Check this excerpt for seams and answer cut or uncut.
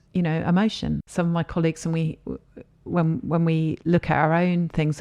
cut